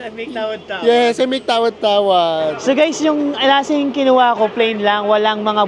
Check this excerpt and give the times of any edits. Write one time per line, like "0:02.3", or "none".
0:02.6